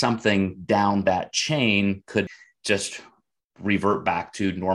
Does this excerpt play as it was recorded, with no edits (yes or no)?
no